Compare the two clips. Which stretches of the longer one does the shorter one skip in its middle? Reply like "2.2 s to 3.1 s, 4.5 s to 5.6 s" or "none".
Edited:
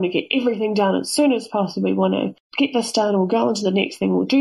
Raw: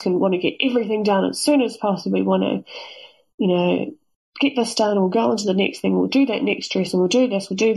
2.7 s to 4.2 s